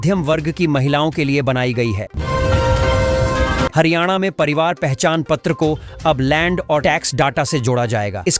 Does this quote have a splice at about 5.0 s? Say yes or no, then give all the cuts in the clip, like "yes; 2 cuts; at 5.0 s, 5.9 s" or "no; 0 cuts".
no; 2 cuts; at 2.1 s, 3.7 s